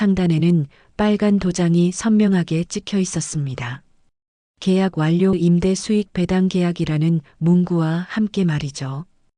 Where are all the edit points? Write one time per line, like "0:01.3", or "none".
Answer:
0:05.3